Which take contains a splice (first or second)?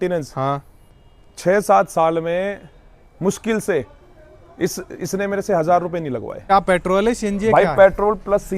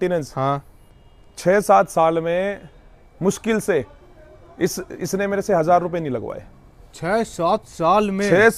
first